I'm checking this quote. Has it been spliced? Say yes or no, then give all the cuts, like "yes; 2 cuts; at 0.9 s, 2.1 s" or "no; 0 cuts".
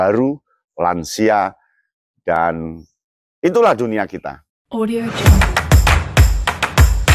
yes; 1 cut; at 4.4 s